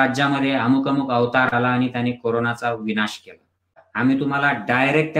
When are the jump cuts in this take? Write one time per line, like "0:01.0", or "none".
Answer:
0:03.8